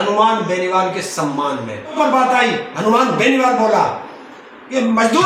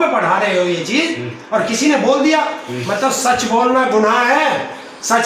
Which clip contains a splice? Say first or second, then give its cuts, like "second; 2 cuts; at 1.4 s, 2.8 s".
first; 1 cut; at 1.9 s